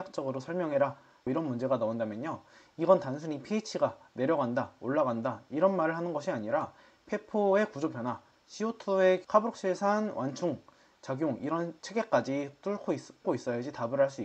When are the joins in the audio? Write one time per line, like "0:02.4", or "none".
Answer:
0:09.3